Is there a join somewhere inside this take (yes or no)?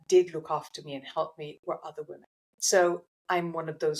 yes